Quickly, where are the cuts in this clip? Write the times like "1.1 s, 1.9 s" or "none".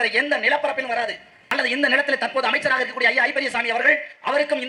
1.4 s